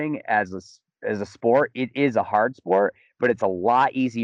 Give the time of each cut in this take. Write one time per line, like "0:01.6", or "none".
none